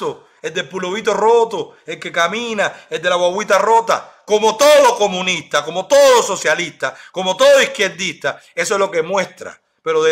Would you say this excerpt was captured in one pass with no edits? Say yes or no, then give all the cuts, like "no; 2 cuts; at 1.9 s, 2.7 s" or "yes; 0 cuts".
yes; 0 cuts